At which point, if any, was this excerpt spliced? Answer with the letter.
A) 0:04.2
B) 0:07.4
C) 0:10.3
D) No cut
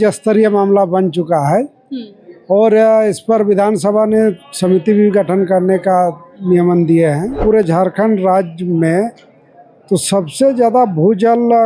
B